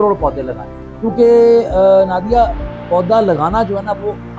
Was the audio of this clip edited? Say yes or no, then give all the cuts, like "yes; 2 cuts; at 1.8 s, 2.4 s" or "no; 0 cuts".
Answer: no; 0 cuts